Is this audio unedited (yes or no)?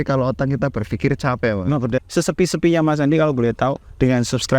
no